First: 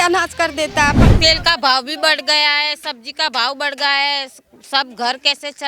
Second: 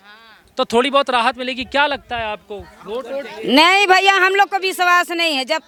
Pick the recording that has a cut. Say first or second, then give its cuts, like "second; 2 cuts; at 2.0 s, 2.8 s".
first; 1 cut; at 1.0 s